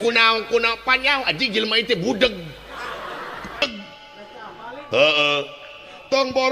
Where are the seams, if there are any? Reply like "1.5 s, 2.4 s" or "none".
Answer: 3.6 s